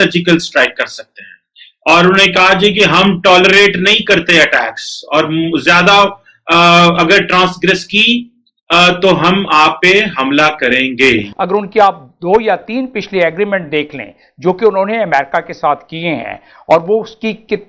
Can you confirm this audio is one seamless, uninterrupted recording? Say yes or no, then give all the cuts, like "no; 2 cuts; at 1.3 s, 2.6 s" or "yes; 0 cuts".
no; 1 cut; at 11.3 s